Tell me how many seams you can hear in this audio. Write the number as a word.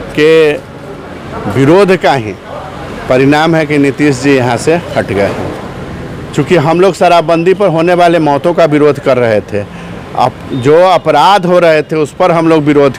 zero